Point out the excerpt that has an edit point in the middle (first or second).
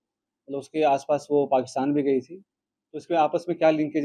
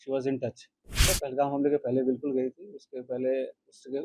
second